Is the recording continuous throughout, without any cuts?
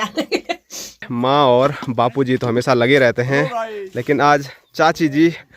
no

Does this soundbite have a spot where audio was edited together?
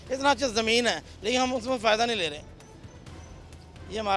no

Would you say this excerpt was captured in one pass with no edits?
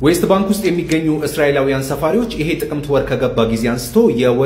yes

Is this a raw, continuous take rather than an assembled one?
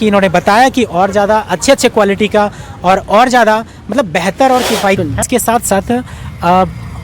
no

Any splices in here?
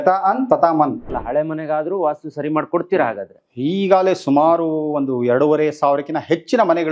yes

